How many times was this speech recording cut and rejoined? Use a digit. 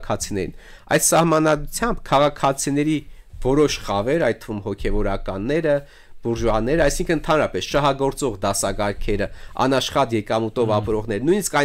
0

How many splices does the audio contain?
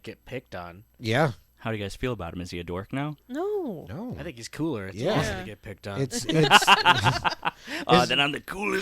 1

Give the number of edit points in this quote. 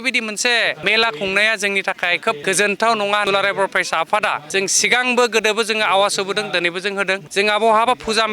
5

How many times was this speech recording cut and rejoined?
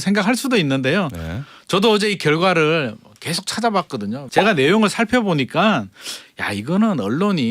1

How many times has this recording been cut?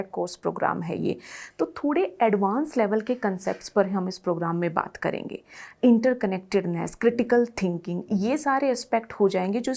0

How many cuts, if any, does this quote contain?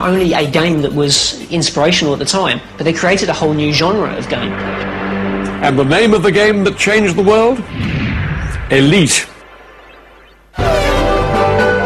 1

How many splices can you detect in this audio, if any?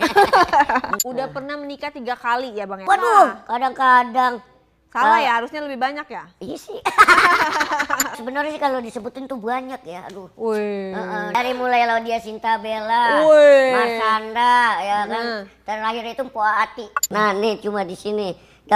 5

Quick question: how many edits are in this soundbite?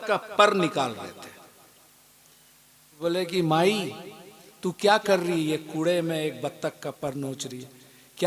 1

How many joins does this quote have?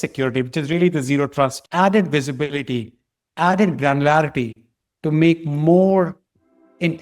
1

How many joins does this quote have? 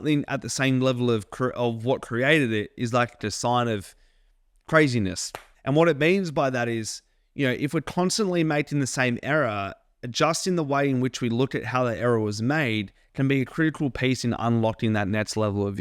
0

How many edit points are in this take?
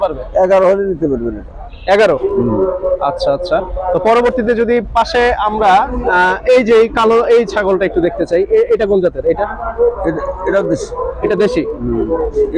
0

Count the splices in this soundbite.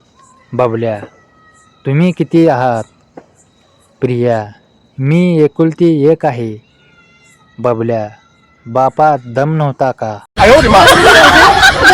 1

